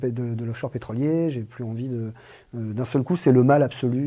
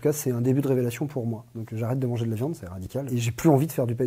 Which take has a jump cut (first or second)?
second